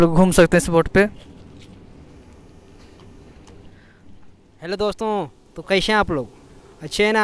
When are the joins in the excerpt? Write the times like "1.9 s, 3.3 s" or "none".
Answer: 4.4 s